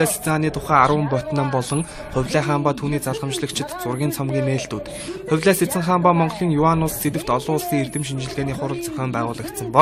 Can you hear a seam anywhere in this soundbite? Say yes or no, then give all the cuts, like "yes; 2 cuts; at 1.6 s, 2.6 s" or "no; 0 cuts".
no; 0 cuts